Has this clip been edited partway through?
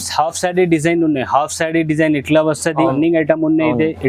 yes; 1 cut; at 2.9 s

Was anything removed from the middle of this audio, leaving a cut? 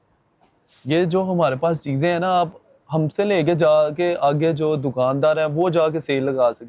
no; 0 cuts

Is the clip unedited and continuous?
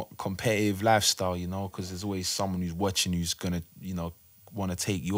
yes; 0 cuts

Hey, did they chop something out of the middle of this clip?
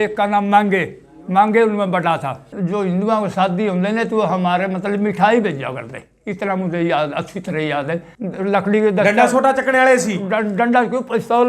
yes; 2 cuts; at 2.5 s, 8.1 s

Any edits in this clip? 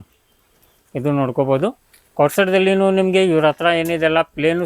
no; 0 cuts

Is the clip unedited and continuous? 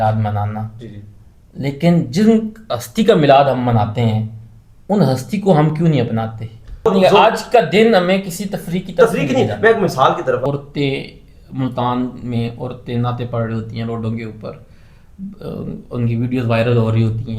no; 2 cuts; at 6.9 s, 10.4 s

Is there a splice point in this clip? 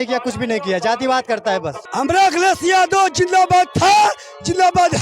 yes; 1 cut; at 1.8 s

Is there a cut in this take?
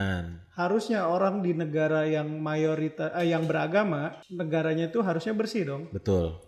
no; 0 cuts

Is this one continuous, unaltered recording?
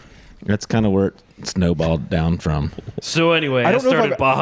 no; 1 cut; at 3.0 s

